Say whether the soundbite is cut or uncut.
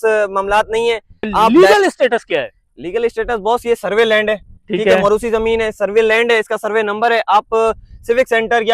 cut